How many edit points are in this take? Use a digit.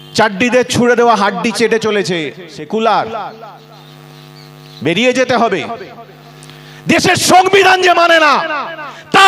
1